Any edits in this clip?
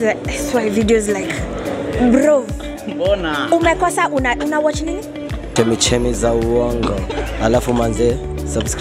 no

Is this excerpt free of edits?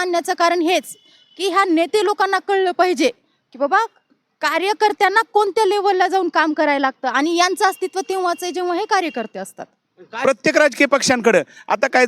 no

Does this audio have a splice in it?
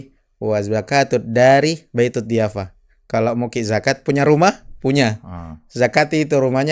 no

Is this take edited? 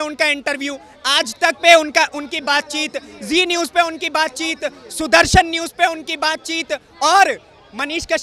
no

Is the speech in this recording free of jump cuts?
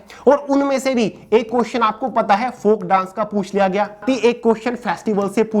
no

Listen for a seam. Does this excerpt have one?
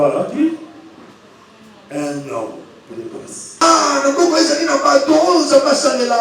yes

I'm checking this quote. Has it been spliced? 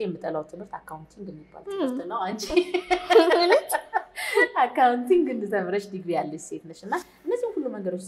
no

